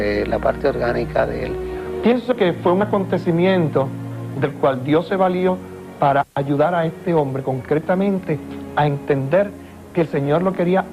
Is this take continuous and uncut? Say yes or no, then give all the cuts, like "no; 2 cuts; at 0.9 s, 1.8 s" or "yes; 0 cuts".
yes; 0 cuts